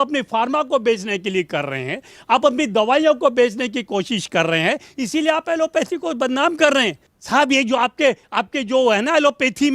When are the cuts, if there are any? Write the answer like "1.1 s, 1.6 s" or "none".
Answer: 7.1 s